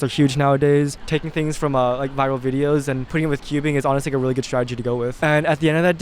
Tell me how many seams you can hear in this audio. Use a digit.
3